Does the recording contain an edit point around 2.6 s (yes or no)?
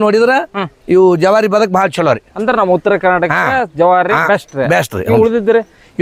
no